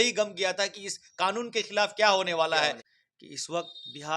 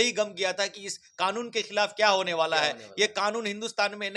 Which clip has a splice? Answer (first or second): first